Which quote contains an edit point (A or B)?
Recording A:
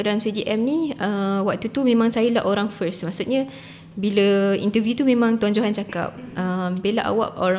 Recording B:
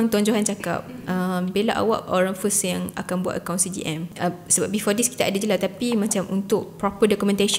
B